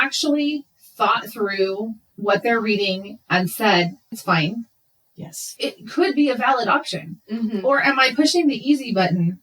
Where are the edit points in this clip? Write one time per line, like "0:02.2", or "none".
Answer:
0:04.1
0:05.5

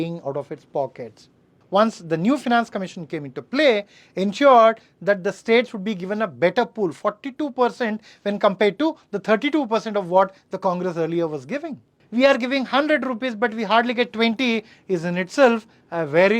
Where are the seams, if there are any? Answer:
0:01.6
0:12.0

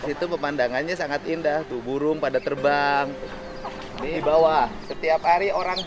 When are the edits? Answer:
0:04.1

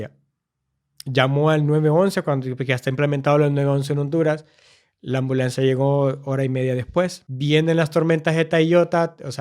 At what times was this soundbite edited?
0:07.3

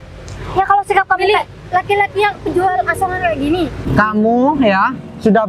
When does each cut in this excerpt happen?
0:03.8

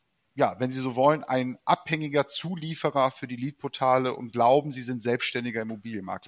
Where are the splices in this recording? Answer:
none

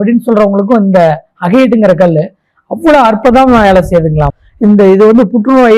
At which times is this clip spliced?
0:04.3

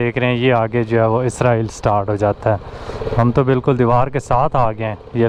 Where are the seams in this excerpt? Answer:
none

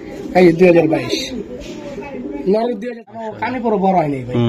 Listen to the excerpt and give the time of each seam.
0:03.0

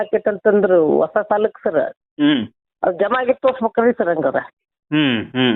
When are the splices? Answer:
none

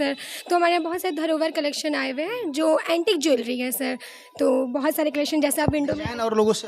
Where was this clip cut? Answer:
none

